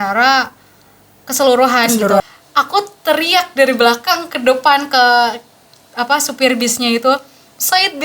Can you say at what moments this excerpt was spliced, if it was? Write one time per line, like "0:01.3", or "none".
0:02.2